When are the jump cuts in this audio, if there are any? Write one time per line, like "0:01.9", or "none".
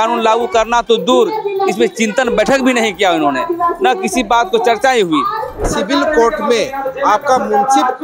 0:05.6